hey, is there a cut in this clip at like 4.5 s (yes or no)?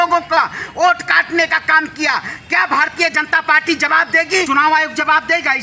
yes